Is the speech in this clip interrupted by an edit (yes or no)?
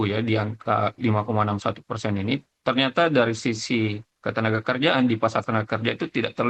no